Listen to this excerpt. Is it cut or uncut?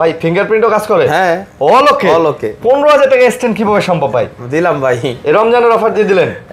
uncut